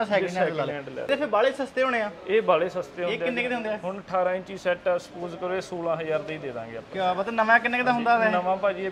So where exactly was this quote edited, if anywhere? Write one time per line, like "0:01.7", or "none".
none

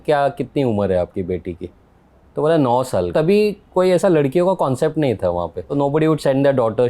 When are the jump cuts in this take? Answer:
0:03.1
0:05.6

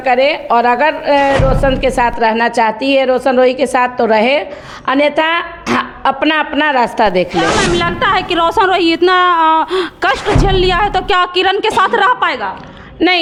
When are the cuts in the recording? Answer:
none

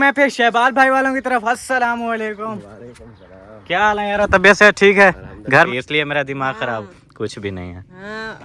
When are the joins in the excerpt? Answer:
0:05.7

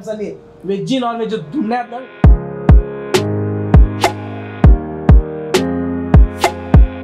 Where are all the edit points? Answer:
0:01.9

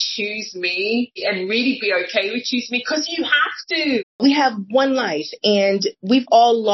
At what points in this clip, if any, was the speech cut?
0:01.2
0:04.2

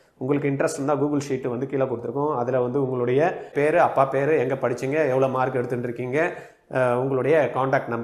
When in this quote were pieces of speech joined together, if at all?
0:03.5

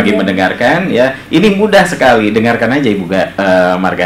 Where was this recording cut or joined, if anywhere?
none

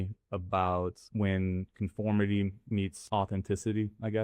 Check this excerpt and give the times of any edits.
0:01.0
0:03.0

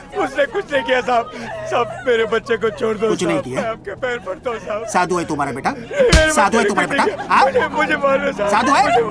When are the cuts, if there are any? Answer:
none

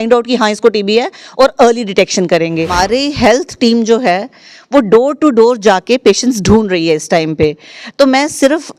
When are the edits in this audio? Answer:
0:02.8

